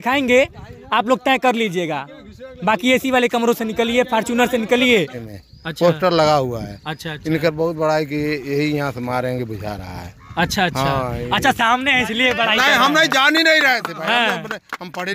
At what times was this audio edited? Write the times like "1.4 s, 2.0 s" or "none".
5.2 s

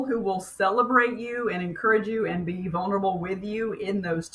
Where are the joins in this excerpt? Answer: none

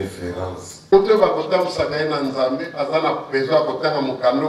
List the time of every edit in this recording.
0.9 s

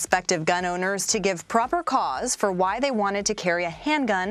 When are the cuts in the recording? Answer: none

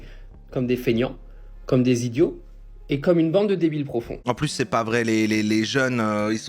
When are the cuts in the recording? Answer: 4.3 s

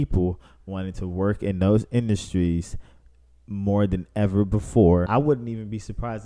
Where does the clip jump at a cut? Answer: 5.1 s

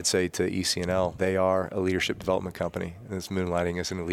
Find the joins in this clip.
1.1 s

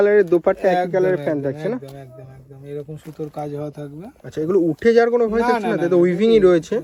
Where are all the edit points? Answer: none

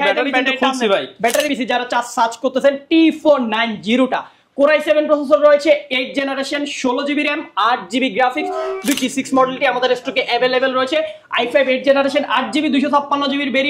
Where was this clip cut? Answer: 1.5 s, 9.0 s

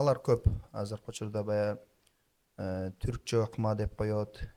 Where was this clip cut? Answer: none

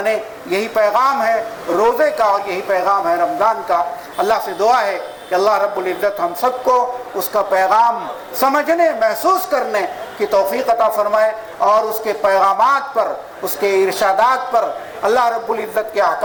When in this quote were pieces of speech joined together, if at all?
none

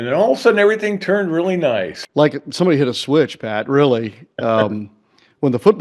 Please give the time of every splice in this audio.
2.0 s

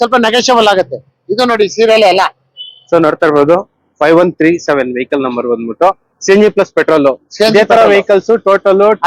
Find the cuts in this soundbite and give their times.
none

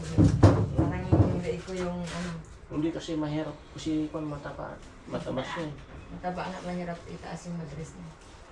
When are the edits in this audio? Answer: none

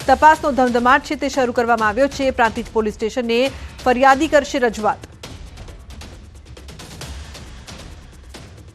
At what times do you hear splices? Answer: 2.2 s

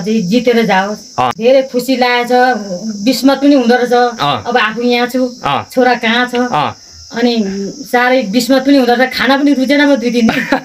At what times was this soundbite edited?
1.4 s

